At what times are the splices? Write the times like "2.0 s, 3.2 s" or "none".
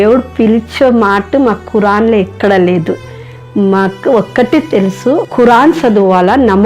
5.3 s